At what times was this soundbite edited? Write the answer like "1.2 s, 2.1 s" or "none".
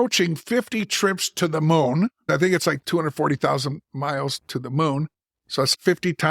2.2 s